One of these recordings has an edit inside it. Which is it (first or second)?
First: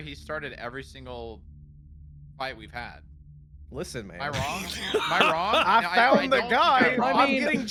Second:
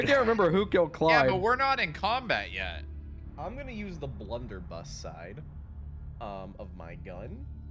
second